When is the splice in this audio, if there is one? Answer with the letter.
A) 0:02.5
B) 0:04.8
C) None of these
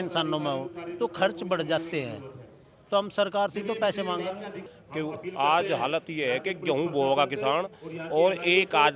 B